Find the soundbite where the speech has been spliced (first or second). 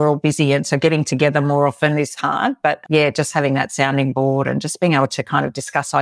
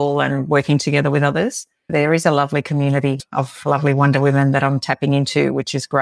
second